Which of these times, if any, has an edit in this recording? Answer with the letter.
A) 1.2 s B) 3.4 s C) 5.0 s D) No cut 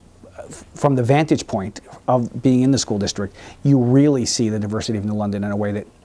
D